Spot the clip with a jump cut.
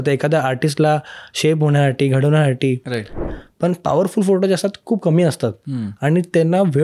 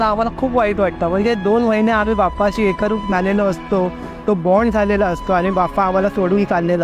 first; 1 cut; at 3.2 s

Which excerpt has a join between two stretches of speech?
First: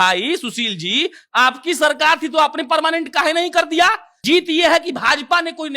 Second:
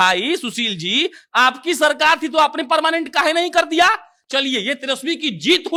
first; 1 cut; at 4.1 s

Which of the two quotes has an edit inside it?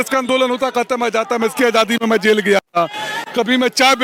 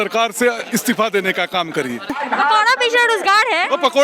second; 1 cut; at 2.1 s

